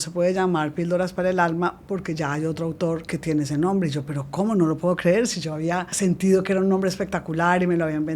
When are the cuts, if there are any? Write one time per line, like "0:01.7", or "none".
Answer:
0:03.0
0:05.9